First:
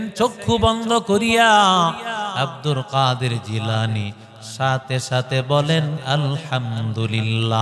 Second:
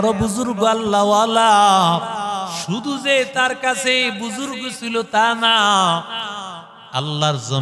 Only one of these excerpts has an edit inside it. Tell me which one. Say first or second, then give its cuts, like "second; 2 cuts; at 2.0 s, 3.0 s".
second; 1 cut; at 2.6 s